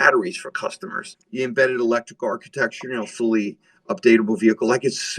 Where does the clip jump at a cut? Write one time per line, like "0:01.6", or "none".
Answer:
0:01.2